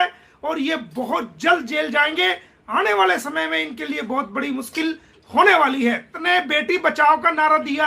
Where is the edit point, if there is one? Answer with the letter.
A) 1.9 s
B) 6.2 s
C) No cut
B